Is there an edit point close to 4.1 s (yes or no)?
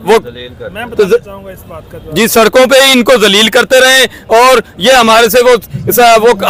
no